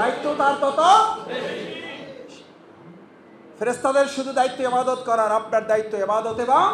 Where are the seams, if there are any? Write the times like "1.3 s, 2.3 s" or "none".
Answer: none